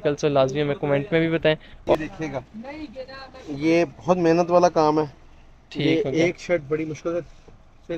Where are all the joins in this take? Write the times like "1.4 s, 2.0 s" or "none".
1.8 s